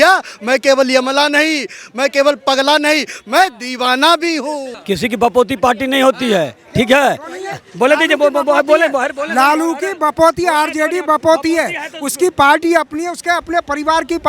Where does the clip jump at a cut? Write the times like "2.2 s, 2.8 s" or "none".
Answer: 4.7 s